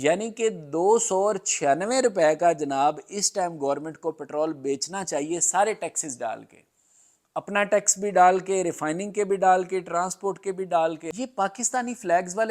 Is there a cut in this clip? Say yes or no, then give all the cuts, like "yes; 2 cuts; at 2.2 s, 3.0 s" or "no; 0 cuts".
yes; 1 cut; at 11.1 s